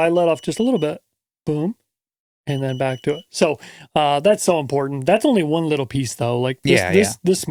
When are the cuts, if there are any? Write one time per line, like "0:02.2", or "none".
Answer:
none